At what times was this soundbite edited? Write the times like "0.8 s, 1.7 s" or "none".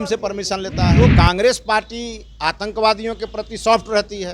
1.0 s